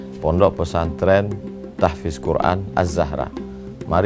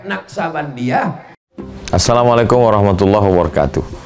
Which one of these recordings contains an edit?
second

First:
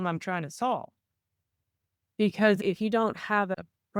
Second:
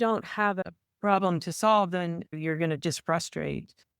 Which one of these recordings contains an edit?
second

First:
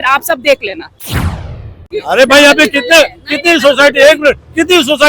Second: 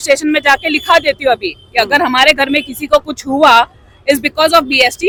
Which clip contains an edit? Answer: first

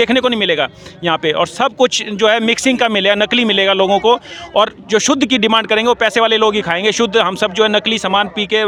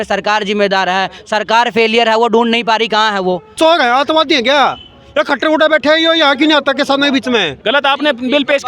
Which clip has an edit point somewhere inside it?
second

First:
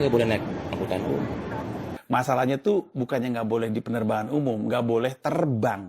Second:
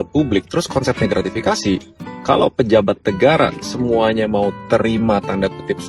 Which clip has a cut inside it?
first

